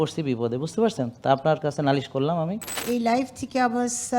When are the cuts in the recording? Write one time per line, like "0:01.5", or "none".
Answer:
0:02.8